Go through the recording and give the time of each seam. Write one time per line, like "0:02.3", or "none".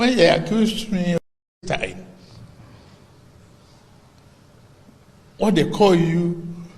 0:01.2